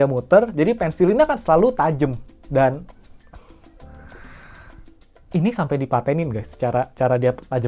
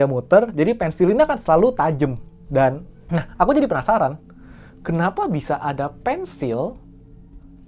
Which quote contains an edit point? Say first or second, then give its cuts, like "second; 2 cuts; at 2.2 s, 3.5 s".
second; 1 cut; at 3.0 s